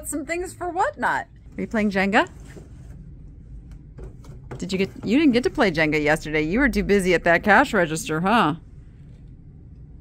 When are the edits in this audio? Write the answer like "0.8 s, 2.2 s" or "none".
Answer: 1.4 s